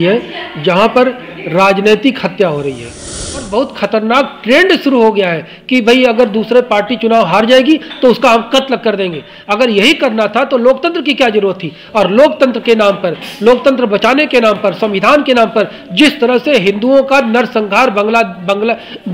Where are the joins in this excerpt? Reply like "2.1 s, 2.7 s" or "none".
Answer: 3.4 s